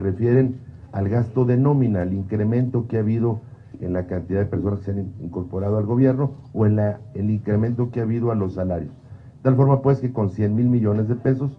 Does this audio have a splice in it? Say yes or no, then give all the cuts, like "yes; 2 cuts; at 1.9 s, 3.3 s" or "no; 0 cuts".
no; 0 cuts